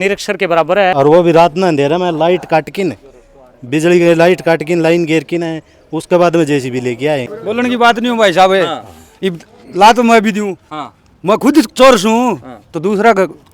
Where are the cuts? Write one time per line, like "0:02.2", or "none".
0:00.9
0:07.4